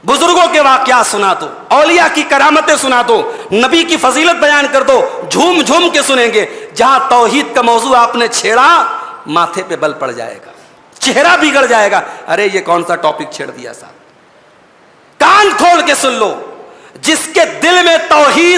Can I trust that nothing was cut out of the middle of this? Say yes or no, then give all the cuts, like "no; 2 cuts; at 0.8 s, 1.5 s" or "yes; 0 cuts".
yes; 0 cuts